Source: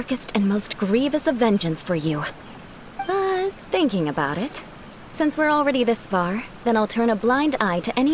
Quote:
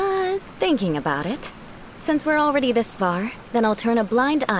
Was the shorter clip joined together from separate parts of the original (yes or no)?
no